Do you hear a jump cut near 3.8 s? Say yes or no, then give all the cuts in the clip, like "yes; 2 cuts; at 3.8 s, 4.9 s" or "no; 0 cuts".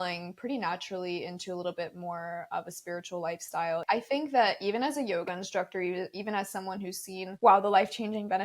yes; 2 cuts; at 3.8 s, 7.3 s